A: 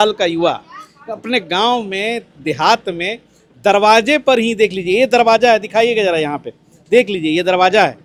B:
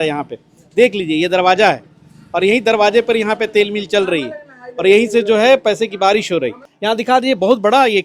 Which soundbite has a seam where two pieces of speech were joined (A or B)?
B